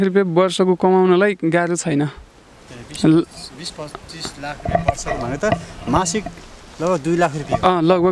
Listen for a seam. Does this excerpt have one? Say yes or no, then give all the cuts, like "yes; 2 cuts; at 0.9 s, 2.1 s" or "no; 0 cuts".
no; 0 cuts